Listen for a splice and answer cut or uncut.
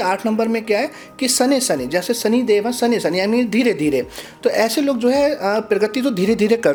uncut